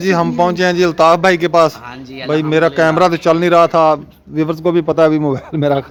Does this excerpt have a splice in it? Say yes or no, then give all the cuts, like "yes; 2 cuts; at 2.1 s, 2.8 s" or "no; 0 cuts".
no; 0 cuts